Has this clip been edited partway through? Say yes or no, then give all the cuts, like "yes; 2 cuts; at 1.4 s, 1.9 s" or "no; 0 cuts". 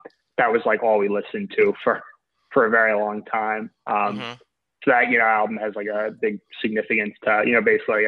no; 0 cuts